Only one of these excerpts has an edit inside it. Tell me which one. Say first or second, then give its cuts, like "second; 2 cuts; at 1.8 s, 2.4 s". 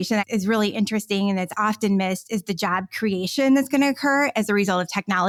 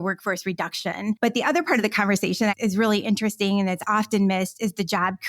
second; 1 cut; at 1.2 s